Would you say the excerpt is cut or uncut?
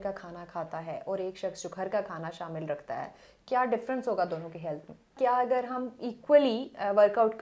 cut